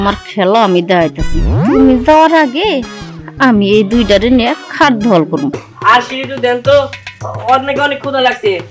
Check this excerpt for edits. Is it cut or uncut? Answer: cut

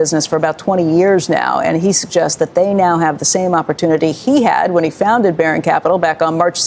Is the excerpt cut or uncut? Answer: uncut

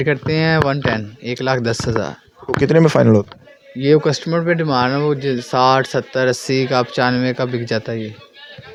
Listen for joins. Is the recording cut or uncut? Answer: uncut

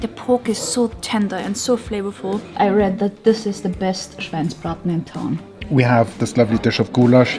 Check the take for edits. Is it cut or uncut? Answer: cut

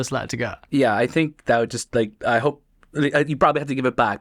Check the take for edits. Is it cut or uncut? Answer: uncut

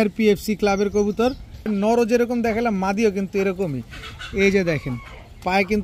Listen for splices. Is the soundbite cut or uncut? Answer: cut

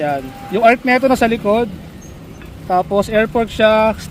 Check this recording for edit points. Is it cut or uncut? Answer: uncut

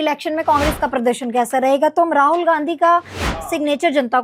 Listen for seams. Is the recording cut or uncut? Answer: uncut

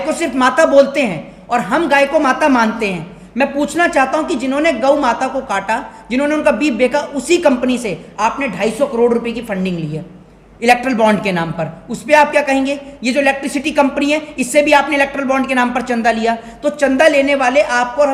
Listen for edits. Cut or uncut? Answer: uncut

